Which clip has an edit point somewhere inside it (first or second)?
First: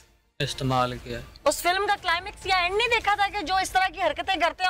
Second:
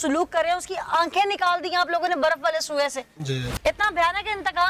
second